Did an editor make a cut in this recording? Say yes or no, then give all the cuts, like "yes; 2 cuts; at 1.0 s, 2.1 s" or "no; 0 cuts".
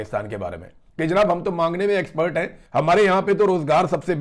no; 0 cuts